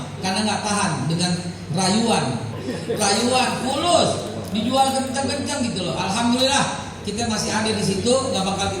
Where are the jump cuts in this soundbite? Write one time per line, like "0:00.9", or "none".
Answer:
0:02.5